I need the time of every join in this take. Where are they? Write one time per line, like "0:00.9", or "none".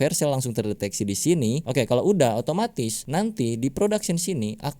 0:01.6
0:03.0